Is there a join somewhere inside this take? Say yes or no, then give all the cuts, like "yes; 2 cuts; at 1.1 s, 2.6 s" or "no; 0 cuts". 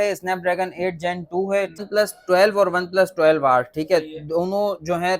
yes; 1 cut; at 1.8 s